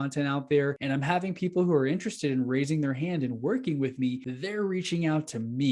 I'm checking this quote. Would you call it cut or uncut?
cut